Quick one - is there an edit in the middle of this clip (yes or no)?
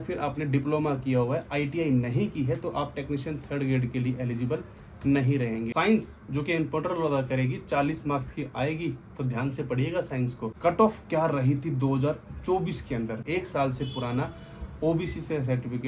yes